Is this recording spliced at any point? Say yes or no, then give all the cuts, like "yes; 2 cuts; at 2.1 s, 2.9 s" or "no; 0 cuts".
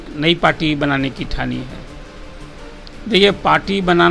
no; 0 cuts